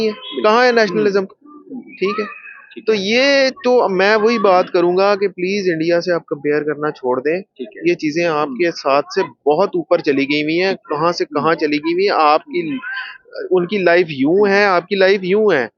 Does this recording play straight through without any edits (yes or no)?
yes